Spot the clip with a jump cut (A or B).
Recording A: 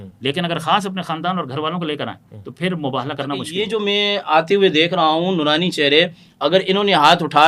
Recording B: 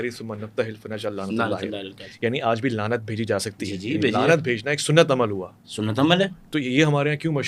A